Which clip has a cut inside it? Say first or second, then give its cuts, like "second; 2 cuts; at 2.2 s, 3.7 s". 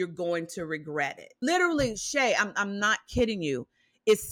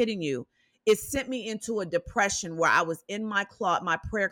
first; 1 cut; at 1.4 s